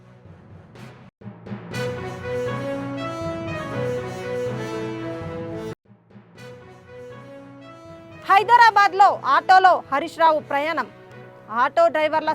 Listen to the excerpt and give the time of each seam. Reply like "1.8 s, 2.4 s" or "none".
1.1 s